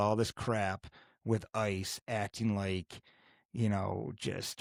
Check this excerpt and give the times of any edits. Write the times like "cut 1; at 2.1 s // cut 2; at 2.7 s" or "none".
none